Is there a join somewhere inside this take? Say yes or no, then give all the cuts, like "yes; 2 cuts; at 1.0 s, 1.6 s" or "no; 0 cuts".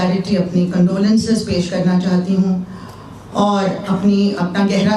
no; 0 cuts